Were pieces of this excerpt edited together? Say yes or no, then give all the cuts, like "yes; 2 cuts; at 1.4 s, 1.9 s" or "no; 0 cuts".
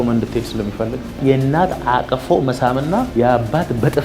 yes; 2 cuts; at 1.1 s, 3.1 s